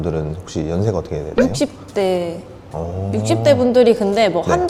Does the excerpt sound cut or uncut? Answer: uncut